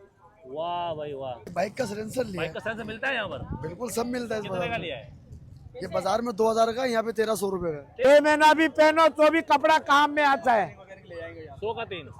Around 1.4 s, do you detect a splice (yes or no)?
yes